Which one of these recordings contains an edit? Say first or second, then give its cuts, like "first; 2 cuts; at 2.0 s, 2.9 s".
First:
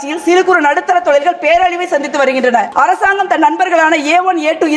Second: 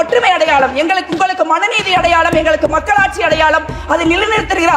first; 1 cut; at 2.7 s